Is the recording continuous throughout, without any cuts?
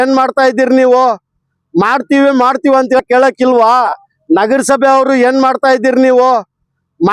no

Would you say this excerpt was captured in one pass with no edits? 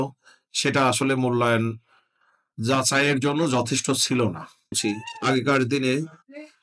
no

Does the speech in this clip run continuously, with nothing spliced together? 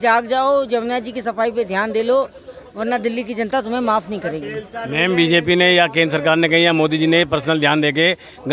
yes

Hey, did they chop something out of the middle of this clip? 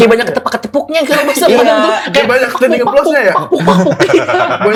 no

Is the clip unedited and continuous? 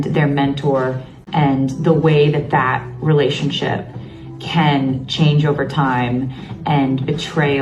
yes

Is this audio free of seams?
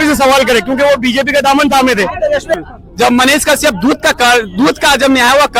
no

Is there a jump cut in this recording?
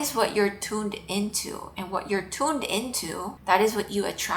no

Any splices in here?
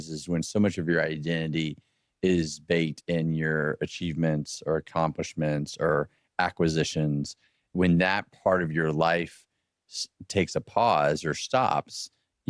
no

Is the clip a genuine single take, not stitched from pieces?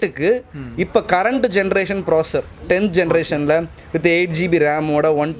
yes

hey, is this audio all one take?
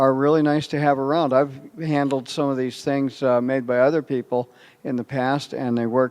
no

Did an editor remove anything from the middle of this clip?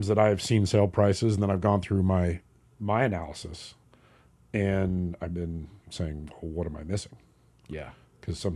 no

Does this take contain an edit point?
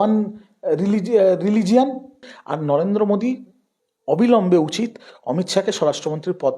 yes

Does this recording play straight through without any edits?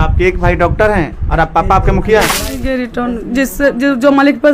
no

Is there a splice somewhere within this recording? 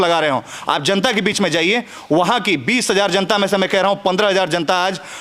no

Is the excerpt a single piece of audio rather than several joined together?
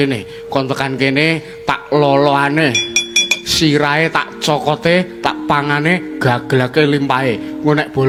yes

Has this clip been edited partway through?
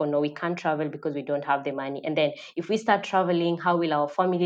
no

